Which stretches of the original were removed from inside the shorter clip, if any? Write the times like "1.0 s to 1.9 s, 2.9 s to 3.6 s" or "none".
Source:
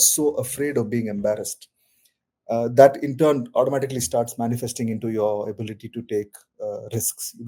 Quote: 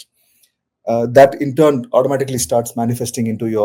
none